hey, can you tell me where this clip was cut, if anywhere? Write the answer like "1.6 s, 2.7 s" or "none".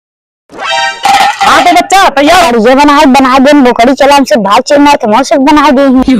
2.5 s